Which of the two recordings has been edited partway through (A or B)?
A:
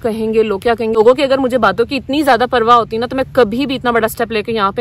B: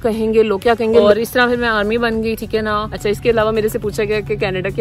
B